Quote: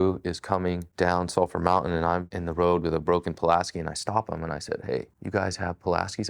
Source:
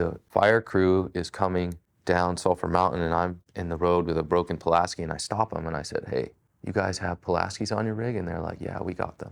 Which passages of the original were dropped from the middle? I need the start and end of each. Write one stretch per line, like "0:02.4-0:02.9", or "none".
0:01.7-0:01.9
0:03.4-0:03.6
0:06.4-0:06.6